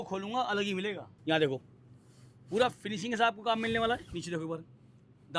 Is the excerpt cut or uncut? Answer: cut